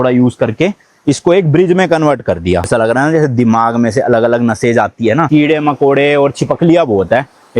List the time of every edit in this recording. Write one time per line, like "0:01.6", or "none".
0:02.7
0:05.3